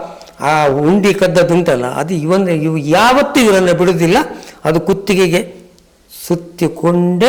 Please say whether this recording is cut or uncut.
uncut